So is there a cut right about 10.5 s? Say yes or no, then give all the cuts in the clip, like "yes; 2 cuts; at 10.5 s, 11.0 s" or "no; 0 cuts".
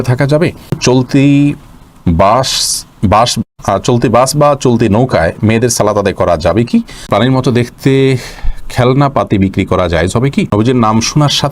yes; 3 cuts; at 0.8 s, 7.0 s, 10.5 s